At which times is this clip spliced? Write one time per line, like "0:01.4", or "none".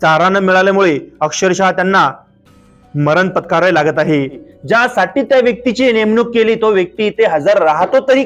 0:04.5